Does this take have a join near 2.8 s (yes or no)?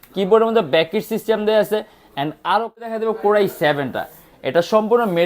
yes